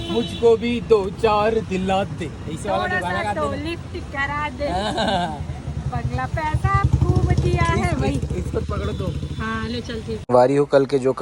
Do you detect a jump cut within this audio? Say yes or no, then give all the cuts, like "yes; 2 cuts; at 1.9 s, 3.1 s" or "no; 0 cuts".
yes; 1 cut; at 10.2 s